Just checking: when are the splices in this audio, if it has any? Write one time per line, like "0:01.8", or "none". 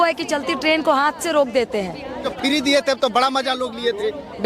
0:02.3